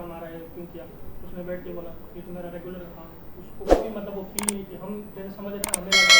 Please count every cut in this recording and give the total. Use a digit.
0